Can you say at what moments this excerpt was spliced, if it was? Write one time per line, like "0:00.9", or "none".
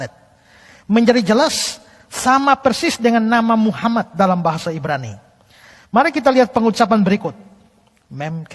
none